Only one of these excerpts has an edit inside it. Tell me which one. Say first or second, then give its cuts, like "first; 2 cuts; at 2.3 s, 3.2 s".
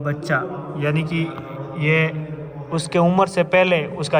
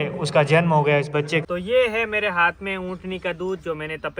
second; 1 cut; at 1.4 s